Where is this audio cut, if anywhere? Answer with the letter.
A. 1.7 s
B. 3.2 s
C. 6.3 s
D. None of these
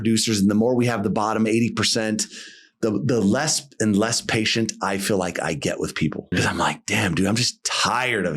C